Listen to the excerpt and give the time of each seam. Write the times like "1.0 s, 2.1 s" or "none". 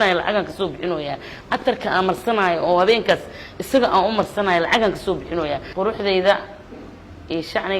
5.7 s